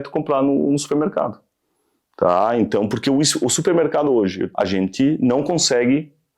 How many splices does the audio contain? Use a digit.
1